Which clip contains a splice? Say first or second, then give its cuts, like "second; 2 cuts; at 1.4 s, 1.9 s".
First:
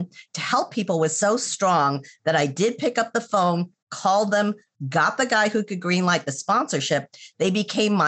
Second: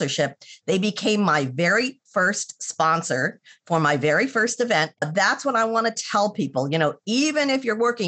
second; 1 cut; at 5.0 s